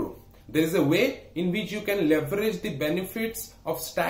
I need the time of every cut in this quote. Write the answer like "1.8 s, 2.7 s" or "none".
none